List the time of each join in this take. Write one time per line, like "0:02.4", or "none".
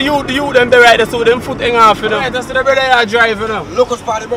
0:02.4